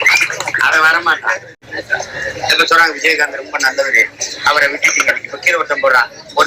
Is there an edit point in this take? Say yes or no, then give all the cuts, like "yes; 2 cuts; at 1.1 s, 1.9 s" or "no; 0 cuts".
no; 0 cuts